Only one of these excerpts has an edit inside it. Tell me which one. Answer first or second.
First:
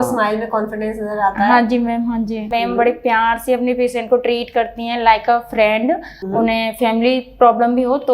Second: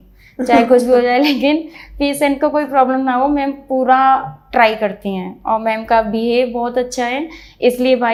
first